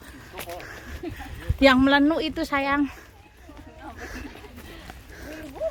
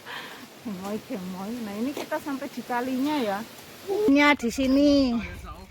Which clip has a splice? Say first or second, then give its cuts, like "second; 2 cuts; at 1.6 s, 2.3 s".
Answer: second; 1 cut; at 4.1 s